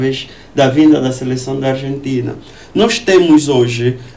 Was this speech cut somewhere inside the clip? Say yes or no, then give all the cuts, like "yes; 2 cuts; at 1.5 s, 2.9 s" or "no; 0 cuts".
no; 0 cuts